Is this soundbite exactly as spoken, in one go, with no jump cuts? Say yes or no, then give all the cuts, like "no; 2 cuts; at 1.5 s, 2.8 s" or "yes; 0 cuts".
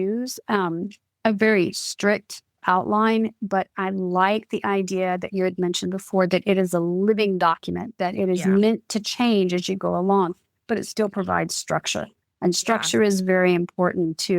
no; 2 cuts; at 1.0 s, 2.6 s